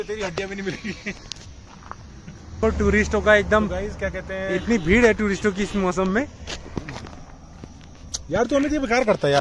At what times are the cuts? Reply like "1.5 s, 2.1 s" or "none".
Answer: none